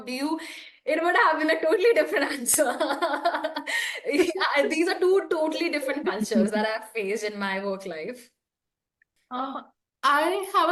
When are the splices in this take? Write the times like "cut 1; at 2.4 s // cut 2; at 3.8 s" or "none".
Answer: none